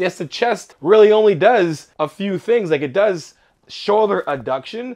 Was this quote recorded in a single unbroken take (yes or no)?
yes